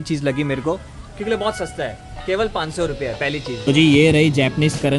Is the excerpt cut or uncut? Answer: cut